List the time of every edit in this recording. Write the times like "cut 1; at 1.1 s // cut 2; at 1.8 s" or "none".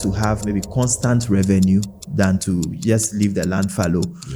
none